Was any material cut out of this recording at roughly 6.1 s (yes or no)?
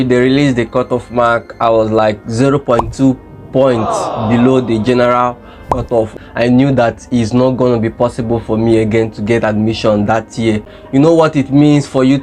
yes